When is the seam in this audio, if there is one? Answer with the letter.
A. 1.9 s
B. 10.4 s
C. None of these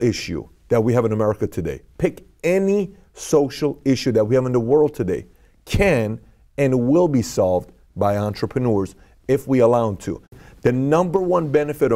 B